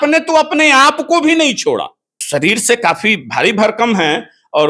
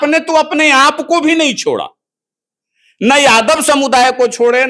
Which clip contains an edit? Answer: first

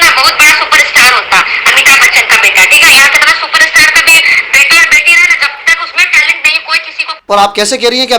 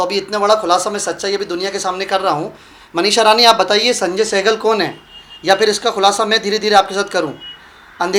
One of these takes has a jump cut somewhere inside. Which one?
first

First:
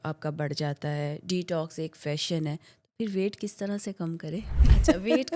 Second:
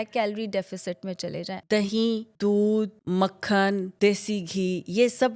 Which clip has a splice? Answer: second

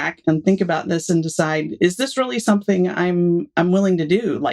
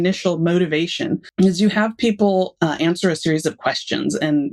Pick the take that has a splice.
second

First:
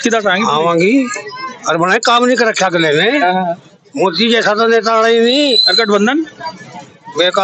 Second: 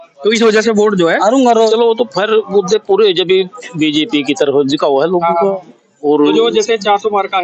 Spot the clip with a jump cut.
second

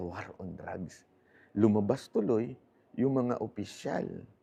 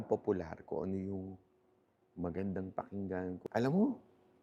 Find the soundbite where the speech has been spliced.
second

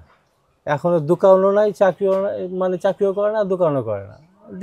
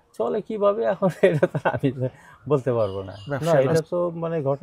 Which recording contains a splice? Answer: second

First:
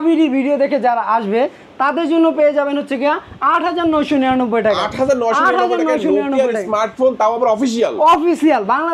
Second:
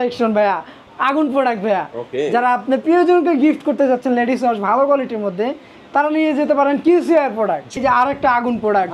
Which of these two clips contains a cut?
second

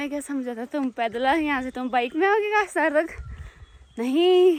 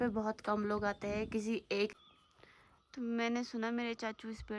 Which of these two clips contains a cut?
second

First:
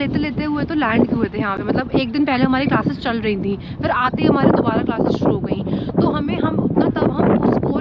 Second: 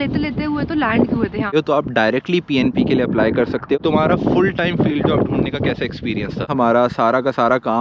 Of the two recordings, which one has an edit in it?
second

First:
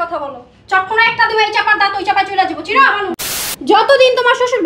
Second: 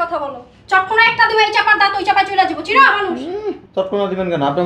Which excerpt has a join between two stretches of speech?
first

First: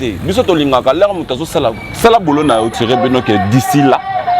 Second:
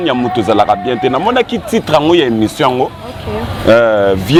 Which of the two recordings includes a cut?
first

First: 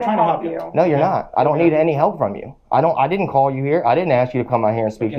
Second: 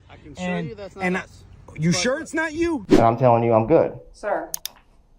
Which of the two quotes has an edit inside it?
second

